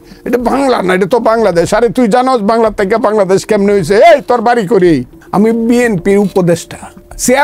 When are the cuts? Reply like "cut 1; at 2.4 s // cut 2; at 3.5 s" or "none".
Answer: cut 1; at 5.1 s